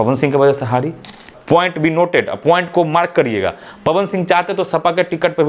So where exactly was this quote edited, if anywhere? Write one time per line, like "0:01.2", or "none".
0:01.2